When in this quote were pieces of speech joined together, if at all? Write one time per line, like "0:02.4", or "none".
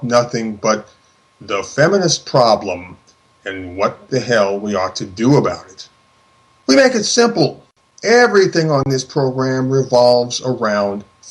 0:01.9